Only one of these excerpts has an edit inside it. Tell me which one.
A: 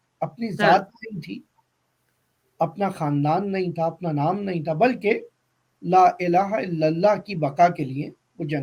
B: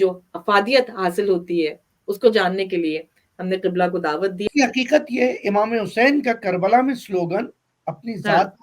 B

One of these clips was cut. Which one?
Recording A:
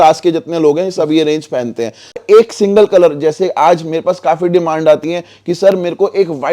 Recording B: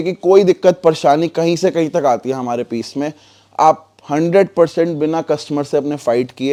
A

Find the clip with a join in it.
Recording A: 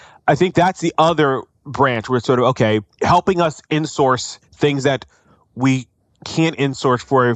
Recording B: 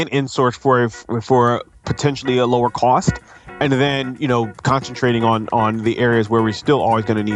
A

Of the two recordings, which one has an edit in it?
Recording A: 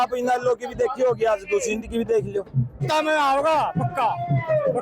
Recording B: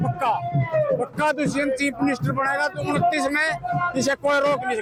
A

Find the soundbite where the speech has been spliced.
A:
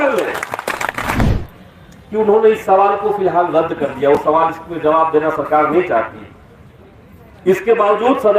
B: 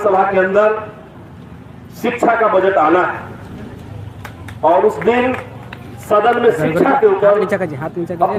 A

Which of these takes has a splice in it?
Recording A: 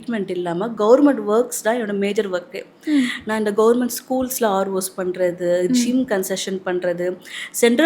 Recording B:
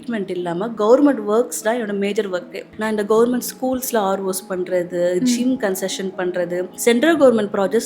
B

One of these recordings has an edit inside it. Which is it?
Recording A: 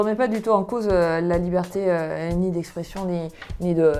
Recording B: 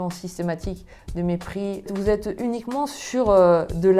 B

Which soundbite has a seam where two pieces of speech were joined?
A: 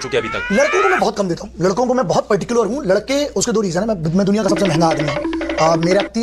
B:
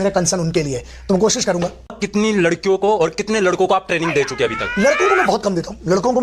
B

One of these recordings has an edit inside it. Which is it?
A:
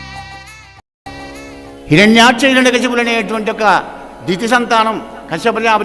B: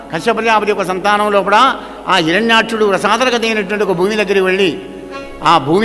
A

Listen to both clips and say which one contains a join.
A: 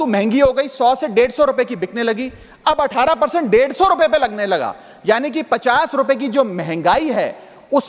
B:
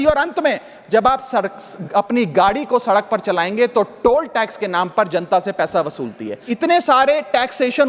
B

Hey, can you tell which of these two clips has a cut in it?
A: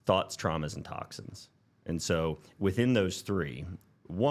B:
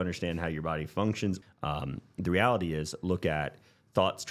B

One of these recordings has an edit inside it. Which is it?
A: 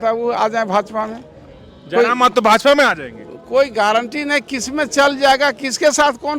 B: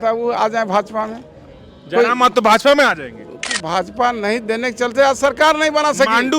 B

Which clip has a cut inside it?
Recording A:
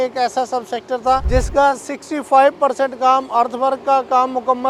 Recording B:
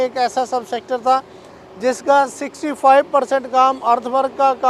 A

